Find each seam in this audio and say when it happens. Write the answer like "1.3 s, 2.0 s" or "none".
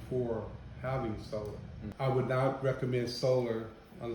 1.8 s